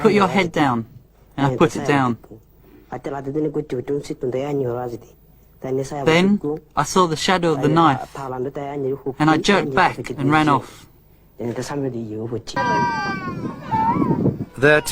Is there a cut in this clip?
yes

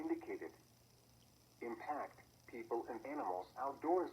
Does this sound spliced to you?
yes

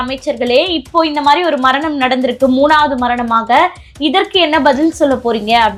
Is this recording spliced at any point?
no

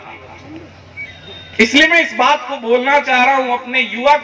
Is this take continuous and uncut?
yes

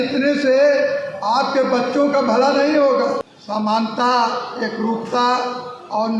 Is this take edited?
yes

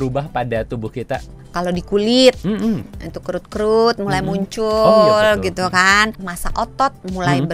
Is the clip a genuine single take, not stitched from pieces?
no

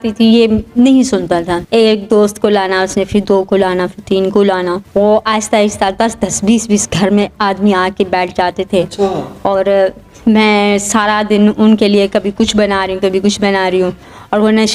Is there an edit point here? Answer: yes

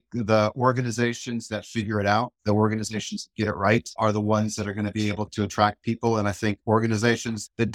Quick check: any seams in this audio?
no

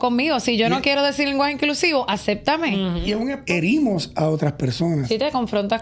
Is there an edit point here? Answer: yes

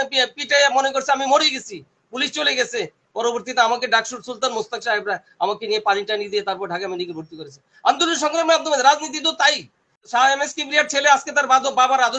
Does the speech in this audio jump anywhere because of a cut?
yes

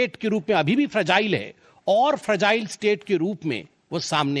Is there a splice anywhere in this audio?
no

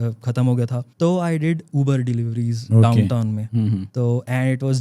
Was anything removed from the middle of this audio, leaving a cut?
yes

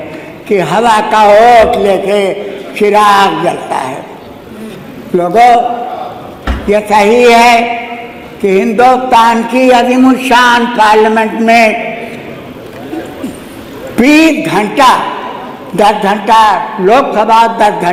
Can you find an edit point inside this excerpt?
no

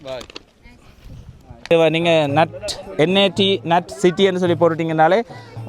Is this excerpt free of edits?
no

